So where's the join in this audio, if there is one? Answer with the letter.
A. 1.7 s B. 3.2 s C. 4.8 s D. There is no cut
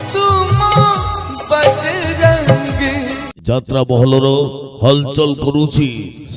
B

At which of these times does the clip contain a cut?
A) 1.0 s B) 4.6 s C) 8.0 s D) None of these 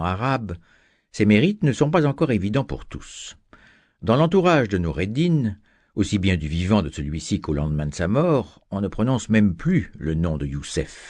B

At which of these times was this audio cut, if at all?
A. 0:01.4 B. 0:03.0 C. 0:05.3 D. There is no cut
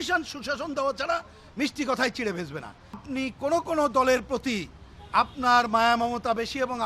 B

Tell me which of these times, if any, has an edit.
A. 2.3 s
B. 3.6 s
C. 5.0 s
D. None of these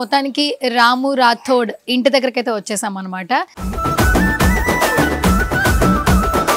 B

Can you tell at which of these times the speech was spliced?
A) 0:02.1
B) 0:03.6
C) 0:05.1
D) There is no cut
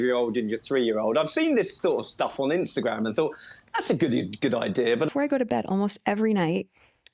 C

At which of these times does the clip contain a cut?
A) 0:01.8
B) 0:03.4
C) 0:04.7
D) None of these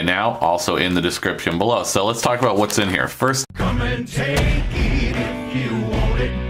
D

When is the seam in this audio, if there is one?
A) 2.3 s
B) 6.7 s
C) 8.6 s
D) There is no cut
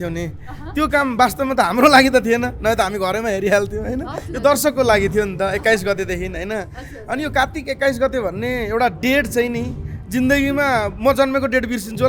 D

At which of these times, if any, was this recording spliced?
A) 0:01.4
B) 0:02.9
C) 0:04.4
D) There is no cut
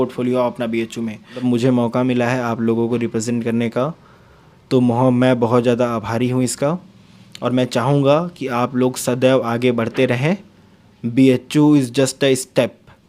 A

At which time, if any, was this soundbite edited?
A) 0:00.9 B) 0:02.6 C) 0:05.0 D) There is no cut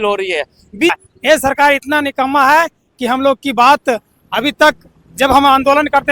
A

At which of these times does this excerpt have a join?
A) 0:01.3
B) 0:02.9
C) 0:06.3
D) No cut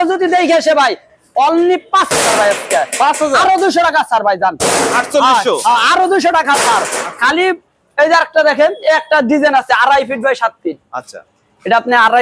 D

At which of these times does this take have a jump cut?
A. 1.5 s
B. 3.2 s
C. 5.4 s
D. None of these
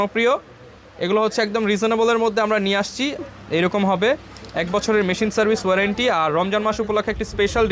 B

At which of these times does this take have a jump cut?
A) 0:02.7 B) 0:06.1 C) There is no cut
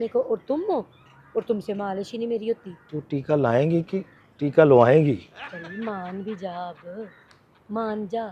A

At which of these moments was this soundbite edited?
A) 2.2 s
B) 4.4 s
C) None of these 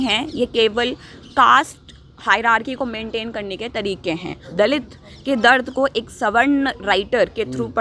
B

